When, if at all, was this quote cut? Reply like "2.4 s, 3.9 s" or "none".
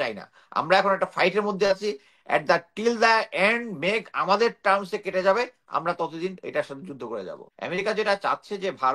7.5 s